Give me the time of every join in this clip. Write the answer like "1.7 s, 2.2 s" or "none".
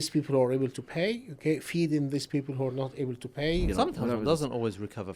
3.7 s